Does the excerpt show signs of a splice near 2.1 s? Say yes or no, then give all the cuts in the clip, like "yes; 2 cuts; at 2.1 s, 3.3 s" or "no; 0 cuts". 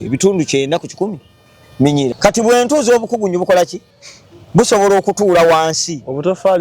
yes; 1 cut; at 2.1 s